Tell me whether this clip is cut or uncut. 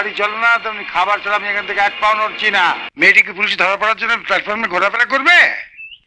cut